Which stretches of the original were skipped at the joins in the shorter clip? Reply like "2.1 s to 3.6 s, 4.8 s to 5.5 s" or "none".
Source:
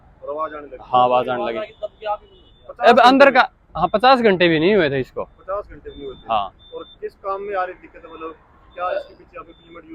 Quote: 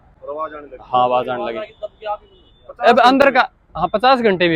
none